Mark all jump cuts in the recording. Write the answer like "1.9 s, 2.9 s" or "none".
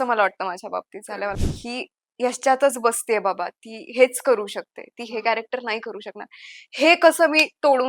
1.3 s